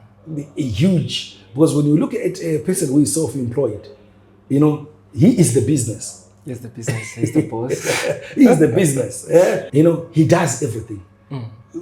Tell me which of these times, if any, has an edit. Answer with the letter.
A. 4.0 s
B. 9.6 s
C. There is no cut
B